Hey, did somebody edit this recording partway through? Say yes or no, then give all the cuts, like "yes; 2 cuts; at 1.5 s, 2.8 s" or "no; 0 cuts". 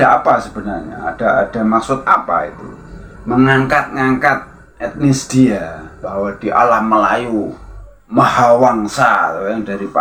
no; 0 cuts